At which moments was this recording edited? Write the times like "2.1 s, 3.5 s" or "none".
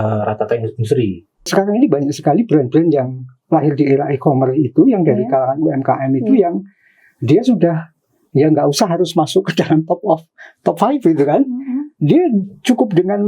1.5 s